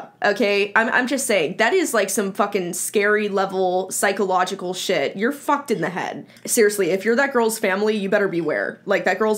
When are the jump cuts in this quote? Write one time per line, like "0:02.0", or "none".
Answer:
0:06.4